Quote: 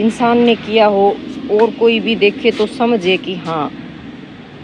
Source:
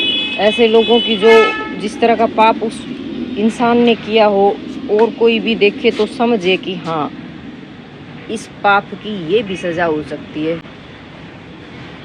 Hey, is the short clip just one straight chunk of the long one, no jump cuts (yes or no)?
yes